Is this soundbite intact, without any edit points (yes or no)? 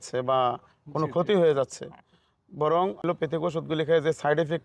no